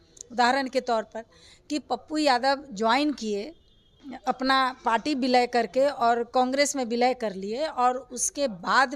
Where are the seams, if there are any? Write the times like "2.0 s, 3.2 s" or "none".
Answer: none

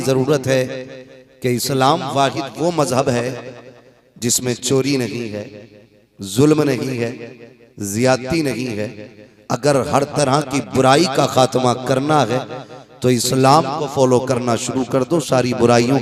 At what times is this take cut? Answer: none

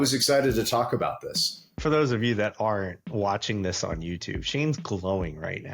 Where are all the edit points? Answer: 1.8 s

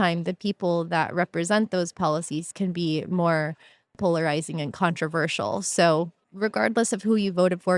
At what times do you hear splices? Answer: 3.9 s, 6.2 s

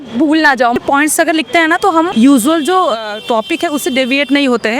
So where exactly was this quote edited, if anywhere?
0.8 s, 2.1 s

